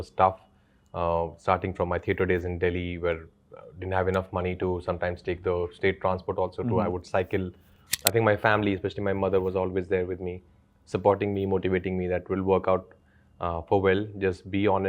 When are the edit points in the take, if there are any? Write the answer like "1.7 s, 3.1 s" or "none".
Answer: 7.9 s